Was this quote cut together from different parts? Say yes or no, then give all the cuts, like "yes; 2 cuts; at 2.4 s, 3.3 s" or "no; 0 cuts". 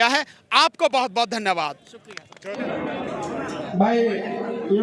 no; 0 cuts